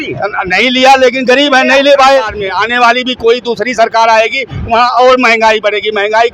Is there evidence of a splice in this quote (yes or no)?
yes